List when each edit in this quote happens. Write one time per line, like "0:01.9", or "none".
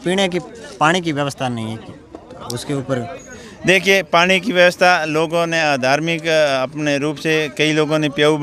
none